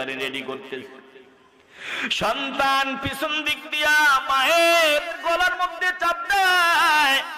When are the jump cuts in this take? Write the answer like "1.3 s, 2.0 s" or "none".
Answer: 5.2 s